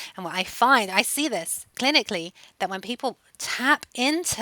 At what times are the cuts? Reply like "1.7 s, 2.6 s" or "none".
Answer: 1.7 s